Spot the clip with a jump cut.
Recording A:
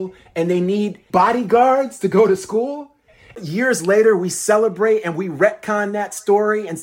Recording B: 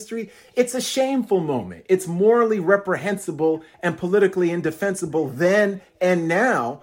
A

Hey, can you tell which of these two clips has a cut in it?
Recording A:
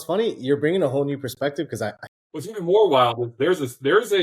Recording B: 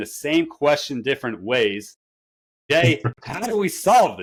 A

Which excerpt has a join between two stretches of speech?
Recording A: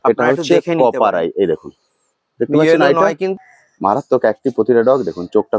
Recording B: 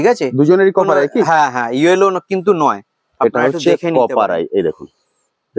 A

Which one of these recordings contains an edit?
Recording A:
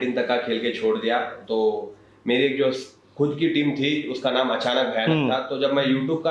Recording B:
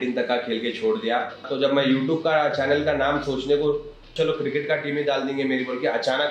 B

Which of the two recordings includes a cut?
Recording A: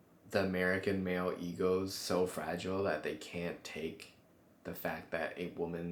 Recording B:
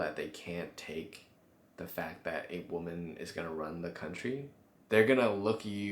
B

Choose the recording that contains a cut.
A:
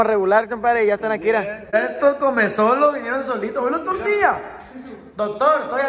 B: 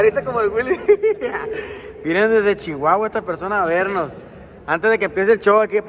A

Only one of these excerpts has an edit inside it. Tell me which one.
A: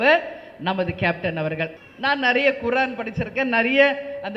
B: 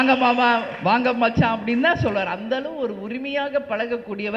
A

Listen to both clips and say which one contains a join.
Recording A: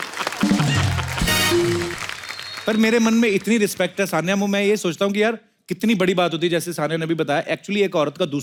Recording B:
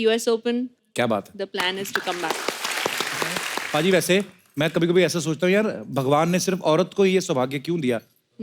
B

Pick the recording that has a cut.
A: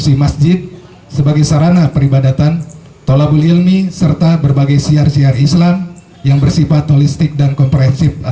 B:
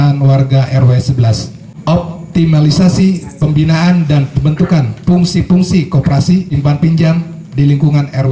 B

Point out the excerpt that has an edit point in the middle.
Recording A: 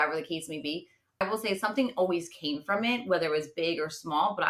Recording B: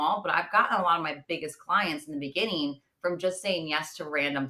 A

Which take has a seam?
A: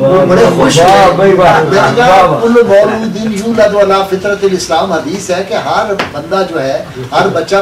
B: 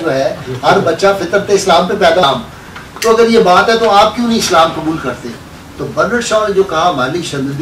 B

